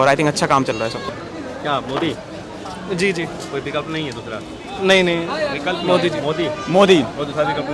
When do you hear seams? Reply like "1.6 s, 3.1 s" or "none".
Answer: 1.0 s

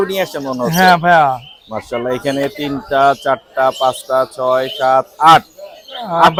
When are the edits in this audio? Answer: none

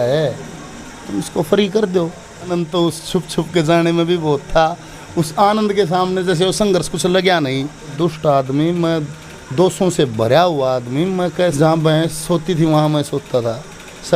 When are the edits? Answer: 2.5 s, 7.9 s, 11.5 s

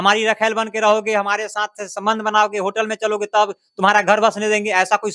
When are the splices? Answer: none

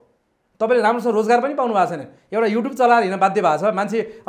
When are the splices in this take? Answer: none

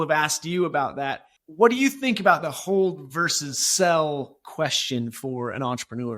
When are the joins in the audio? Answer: 1.3 s

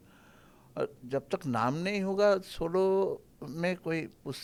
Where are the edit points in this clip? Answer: none

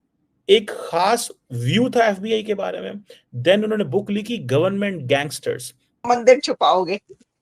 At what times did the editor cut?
6.0 s

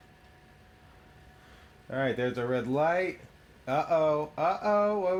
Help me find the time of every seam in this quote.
none

